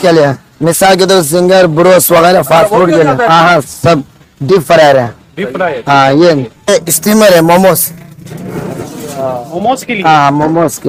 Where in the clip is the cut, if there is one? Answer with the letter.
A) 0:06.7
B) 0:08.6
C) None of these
A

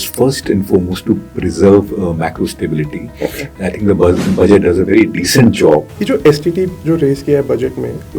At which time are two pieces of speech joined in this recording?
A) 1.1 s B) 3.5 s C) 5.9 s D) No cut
C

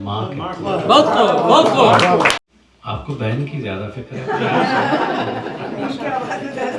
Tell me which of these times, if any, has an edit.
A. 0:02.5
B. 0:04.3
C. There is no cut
A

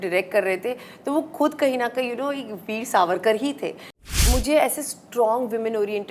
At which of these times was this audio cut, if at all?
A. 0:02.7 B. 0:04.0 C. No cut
B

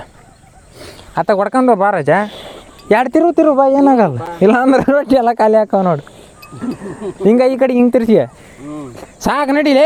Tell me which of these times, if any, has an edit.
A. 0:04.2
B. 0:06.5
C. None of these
C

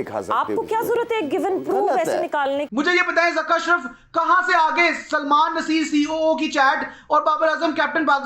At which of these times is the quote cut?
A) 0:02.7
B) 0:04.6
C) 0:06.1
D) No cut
A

